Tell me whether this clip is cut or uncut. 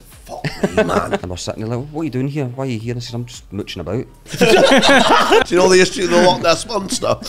cut